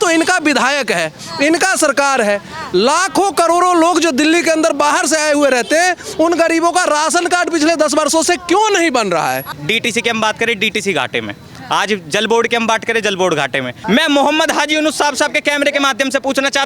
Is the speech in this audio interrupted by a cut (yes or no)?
yes